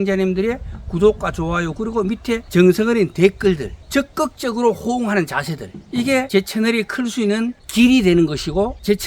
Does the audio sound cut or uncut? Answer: cut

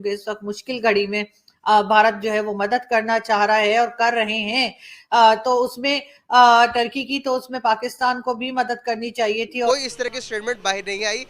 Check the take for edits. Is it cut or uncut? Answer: cut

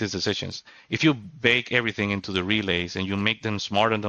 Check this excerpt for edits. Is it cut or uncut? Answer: uncut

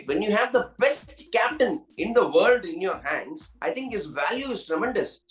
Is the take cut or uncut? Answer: uncut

